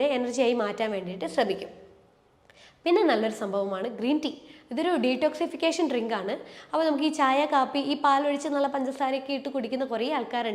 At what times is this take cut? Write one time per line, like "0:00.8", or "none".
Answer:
none

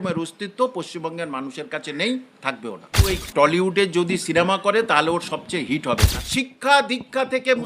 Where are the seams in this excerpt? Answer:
0:03.1
0:06.1

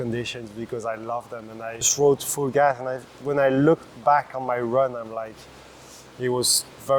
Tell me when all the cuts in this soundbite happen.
0:01.9

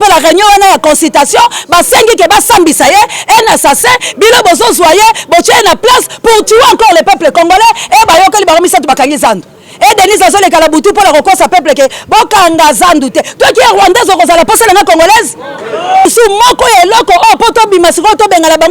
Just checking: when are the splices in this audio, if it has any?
0:16.1

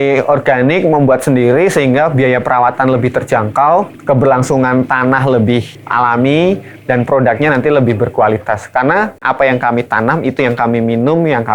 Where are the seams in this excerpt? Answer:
0:03.9
0:05.8
0:09.2

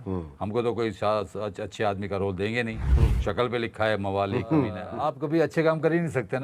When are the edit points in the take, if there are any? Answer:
0:04.9

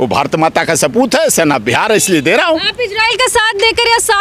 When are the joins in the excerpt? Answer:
none

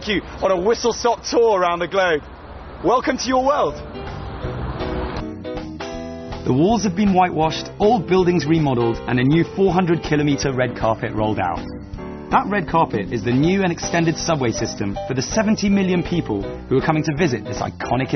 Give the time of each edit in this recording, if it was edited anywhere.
0:13.9

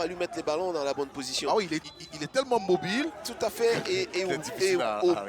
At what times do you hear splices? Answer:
0:01.8

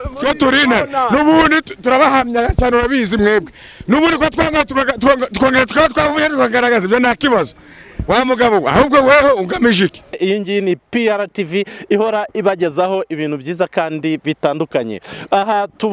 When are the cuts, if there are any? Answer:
0:10.2

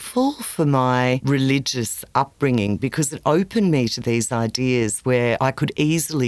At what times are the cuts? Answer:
0:01.2
0:05.4

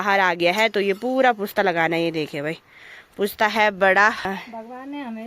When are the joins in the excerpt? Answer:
0:04.3

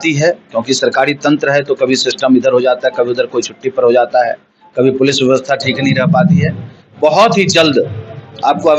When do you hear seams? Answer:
none

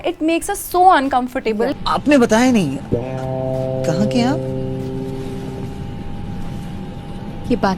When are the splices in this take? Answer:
0:01.8

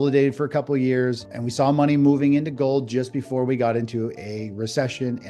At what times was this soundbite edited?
0:01.4

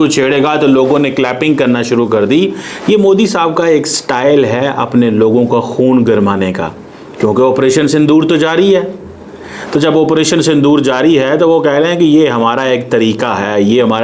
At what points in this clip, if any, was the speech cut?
none

